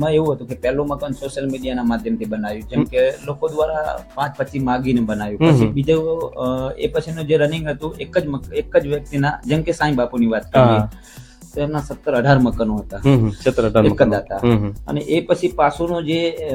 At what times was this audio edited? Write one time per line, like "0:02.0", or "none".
none